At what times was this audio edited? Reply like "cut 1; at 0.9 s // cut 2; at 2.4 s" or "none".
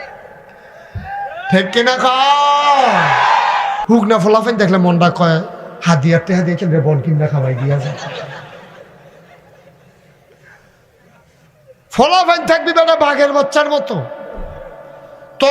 cut 1; at 3.8 s